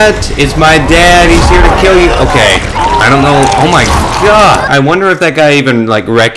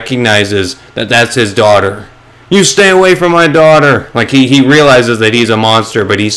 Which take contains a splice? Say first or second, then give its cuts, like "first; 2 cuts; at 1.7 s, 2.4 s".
first; 1 cut; at 4.7 s